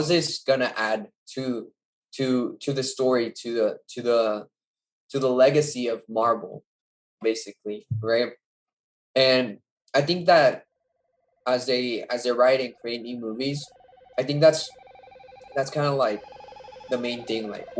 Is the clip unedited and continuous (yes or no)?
yes